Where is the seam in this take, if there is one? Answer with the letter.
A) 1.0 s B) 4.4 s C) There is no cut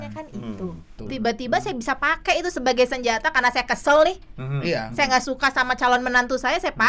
A